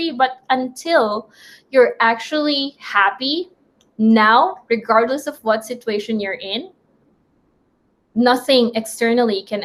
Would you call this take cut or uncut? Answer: uncut